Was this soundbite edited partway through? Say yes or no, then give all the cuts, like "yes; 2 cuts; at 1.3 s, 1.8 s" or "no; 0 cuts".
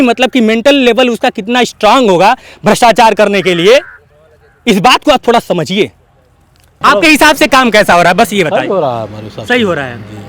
yes; 1 cut; at 6.8 s